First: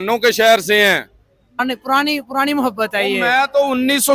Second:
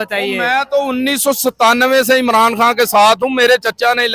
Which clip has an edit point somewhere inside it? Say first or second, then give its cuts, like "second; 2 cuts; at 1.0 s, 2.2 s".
first; 1 cut; at 1.6 s